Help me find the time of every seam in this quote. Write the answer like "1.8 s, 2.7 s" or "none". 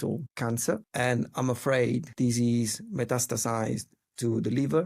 0.8 s, 2.1 s

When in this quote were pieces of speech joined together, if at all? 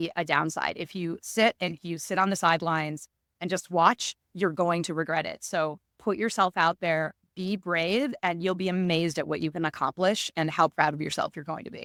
none

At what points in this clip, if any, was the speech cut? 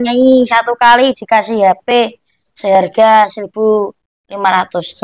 none

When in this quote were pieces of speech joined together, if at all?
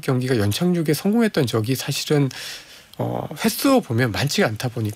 none

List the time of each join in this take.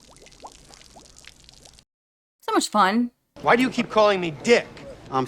3.3 s

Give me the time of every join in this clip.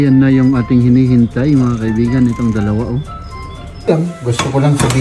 3.9 s

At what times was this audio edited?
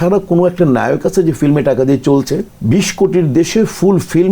2.5 s

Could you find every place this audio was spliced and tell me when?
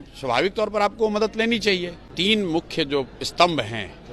2.0 s

